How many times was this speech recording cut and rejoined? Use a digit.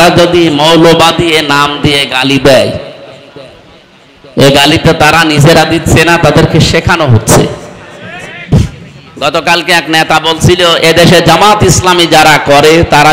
1